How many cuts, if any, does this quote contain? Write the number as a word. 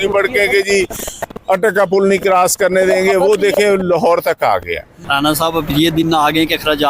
one